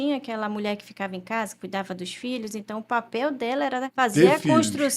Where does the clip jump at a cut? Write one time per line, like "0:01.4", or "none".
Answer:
0:03.9